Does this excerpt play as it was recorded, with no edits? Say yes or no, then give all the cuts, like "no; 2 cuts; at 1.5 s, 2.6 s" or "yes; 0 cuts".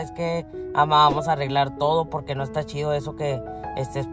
yes; 0 cuts